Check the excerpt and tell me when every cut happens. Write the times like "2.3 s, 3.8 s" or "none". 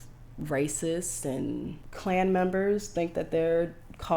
1.8 s